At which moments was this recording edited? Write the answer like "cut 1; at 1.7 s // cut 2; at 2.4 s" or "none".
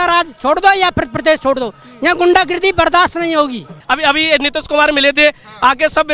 cut 1; at 3.8 s